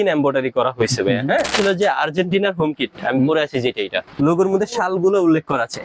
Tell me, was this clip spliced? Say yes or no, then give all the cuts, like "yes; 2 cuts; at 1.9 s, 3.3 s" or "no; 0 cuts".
yes; 2 cuts; at 1.5 s, 4.1 s